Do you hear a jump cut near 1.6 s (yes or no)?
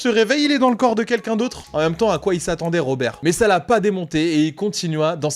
yes